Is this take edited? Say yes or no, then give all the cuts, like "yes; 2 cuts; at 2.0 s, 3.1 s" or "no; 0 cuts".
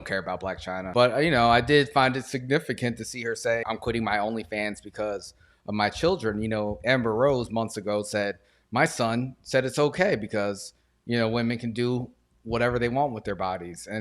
yes; 2 cuts; at 0.9 s, 3.6 s